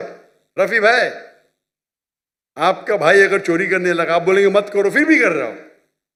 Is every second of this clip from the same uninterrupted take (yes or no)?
yes